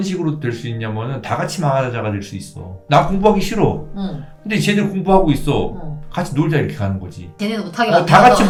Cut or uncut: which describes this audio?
uncut